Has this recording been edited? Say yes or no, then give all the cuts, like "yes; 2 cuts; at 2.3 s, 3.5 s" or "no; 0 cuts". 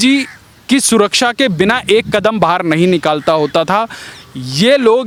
no; 0 cuts